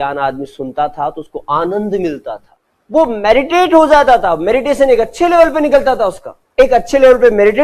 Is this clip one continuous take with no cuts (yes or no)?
yes